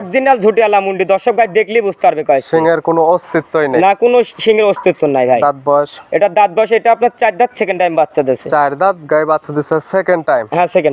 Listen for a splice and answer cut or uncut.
uncut